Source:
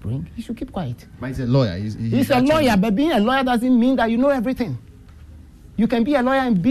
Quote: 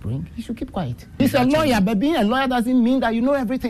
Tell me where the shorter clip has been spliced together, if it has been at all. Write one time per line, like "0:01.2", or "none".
0:01.2